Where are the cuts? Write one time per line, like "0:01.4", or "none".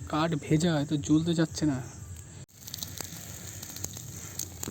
0:02.4

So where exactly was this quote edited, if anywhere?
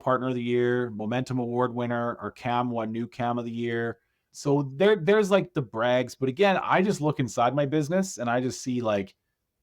0:04.3

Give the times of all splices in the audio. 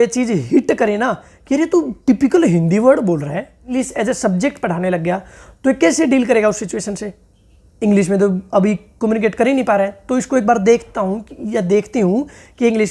0:03.8

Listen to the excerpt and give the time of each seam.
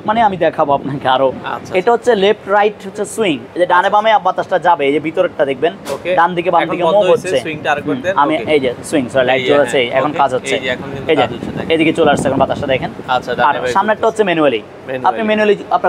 none

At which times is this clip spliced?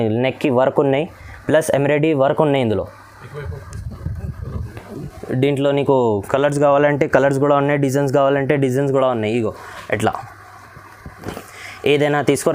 none

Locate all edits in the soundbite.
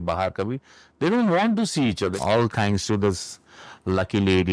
0:02.1

